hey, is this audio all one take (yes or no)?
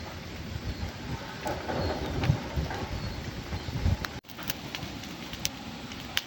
yes